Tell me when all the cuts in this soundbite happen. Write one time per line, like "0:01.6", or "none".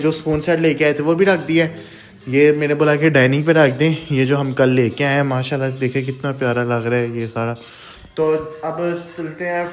none